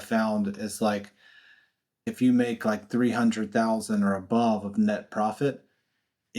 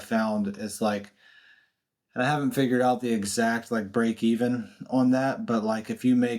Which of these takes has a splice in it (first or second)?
first